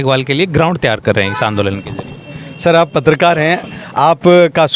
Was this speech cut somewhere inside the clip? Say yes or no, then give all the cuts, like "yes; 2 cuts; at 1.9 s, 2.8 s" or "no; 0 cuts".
no; 0 cuts